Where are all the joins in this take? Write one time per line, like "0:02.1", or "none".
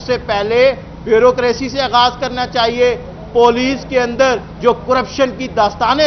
none

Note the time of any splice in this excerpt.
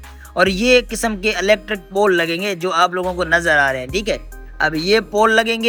none

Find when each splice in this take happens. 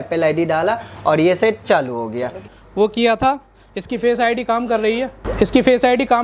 0:02.4
0:05.2

